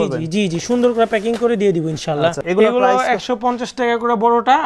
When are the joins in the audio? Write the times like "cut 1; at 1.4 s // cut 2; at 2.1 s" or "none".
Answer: cut 1; at 2.4 s